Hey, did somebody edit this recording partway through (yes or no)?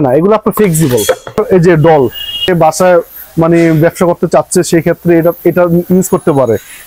yes